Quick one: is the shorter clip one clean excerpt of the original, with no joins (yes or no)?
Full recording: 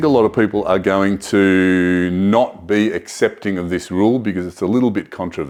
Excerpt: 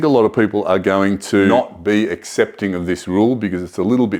no